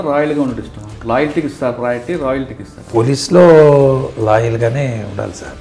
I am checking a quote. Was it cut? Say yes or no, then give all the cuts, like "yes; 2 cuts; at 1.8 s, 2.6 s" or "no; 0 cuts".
yes; 1 cut; at 2.8 s